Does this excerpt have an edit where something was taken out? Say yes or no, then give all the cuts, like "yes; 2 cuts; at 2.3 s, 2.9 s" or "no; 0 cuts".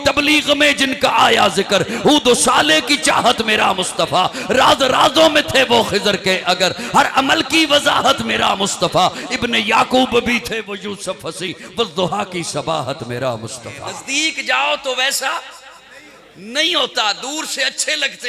yes; 1 cut; at 14.0 s